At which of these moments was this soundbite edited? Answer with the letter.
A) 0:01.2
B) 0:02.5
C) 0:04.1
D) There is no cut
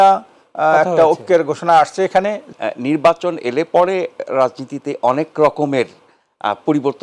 B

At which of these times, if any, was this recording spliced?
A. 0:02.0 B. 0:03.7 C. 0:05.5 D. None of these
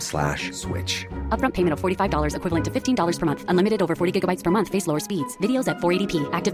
D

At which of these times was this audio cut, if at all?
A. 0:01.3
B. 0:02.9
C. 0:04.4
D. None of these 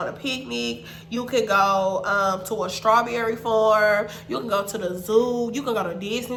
D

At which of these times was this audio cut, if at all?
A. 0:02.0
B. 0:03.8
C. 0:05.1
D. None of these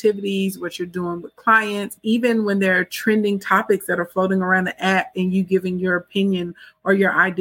A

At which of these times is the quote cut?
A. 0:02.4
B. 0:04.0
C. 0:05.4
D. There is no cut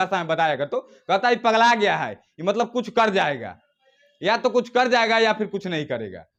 D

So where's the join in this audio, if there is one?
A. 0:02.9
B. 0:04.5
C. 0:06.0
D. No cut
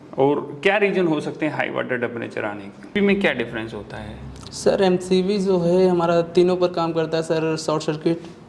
A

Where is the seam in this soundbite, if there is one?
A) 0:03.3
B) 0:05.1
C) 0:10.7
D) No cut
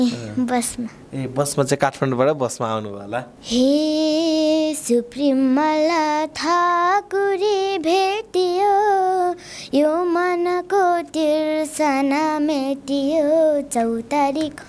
A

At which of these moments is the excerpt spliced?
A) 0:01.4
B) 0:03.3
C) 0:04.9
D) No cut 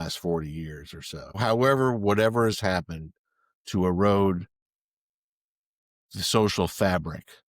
A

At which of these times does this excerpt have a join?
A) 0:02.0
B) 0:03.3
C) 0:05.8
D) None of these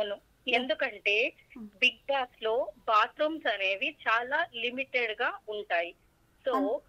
D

